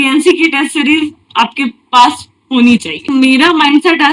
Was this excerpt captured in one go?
no; 1 cut; at 3.1 s

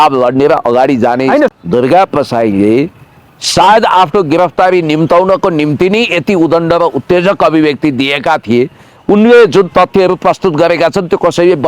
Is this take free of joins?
no; 1 cut; at 1.5 s

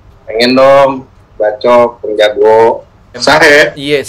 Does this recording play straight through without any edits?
no; 1 cut; at 3.2 s

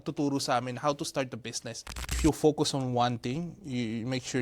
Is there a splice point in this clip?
yes; 1 cut; at 2.2 s

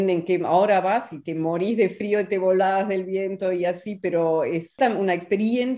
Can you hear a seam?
yes; 1 cut; at 4.8 s

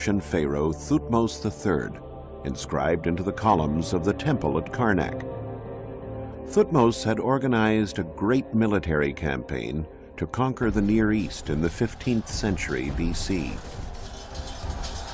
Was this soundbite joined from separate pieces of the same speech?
yes; 1 cut; at 1.9 s

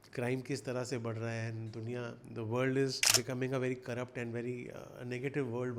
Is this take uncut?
no; 1 cut; at 3.0 s

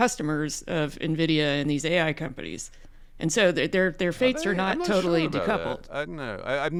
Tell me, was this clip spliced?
no; 0 cuts

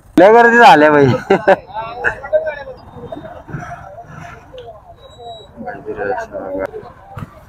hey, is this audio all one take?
no; 2 cuts; at 2.8 s, 6.7 s

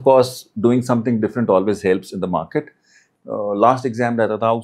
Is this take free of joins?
no; 1 cut; at 3.1 s

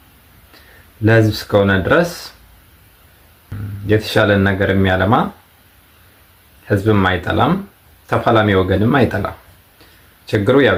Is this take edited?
no; 0 cuts

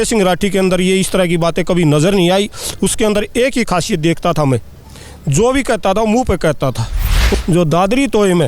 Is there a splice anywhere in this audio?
yes; 1 cut; at 7.3 s

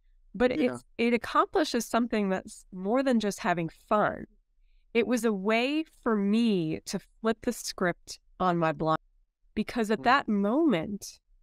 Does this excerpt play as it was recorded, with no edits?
no; 1 cut; at 9.0 s

